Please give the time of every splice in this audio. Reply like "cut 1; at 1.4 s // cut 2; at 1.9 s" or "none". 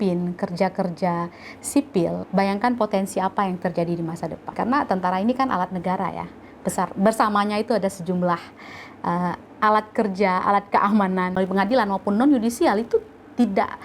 cut 1; at 2.2 s // cut 2; at 4.4 s // cut 3; at 11.4 s

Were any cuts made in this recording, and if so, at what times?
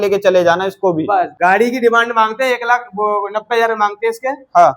cut 1; at 1.4 s

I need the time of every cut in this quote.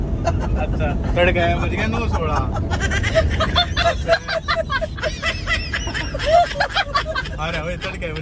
none

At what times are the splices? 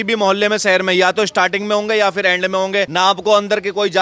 cut 1; at 2.9 s

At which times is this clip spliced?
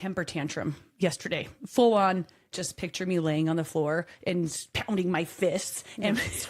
cut 1; at 2.5 s // cut 2; at 4.7 s

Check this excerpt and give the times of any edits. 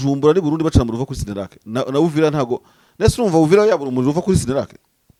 none

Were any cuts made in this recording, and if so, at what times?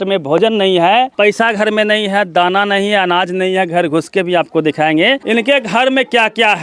cut 1; at 1.1 s // cut 2; at 5.2 s

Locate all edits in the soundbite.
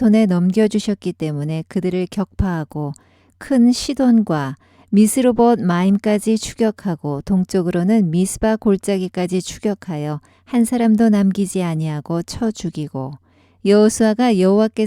cut 1; at 13.5 s

